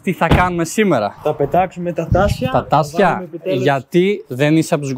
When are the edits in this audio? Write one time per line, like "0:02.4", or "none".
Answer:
0:01.2